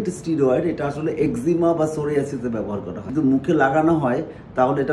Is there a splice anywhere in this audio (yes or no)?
yes